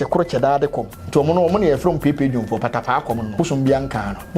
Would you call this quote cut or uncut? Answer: cut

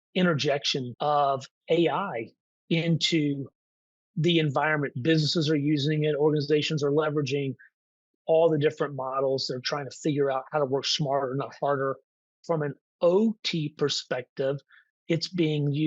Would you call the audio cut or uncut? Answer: cut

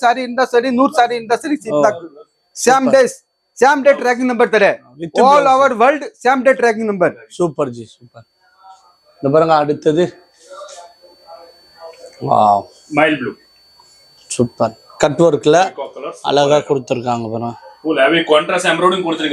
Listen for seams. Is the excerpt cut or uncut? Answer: uncut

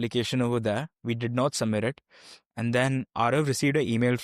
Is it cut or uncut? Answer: uncut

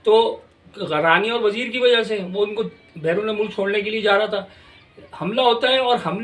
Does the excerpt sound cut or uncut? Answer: uncut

